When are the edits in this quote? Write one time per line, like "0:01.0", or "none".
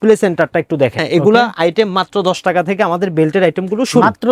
0:01.0